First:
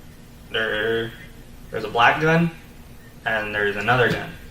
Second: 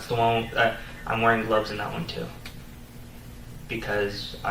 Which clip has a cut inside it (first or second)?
first